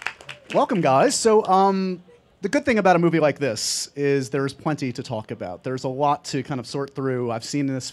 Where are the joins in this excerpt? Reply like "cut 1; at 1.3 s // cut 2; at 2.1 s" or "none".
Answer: none